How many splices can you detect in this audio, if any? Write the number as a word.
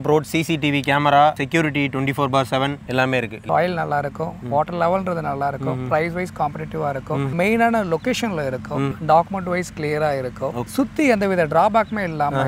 four